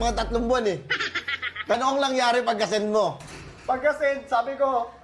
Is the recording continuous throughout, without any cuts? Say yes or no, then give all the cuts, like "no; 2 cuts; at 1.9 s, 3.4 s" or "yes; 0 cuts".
no; 1 cut; at 1.7 s